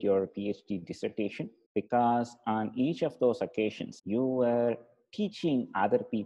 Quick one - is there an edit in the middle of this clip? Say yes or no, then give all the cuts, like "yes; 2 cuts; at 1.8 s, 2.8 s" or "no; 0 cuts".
yes; 2 cuts; at 1.6 s, 3.9 s